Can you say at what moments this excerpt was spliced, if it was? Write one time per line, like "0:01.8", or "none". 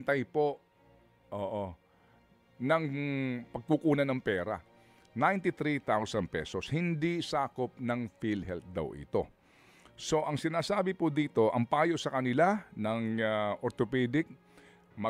none